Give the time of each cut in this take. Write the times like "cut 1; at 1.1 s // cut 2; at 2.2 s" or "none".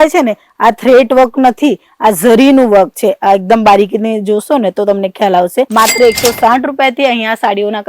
cut 1; at 5.7 s